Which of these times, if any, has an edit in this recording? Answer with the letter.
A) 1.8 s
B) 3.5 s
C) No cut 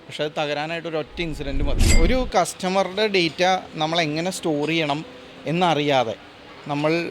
A